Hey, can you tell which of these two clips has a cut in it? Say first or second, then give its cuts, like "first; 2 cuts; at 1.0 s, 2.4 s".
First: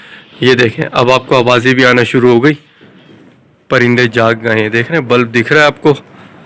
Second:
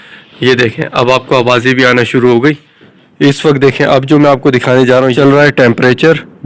second; 1 cut; at 3.0 s